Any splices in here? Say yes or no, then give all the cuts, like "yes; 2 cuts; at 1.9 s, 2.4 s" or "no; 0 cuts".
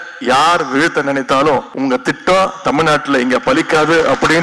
yes; 1 cut; at 1.7 s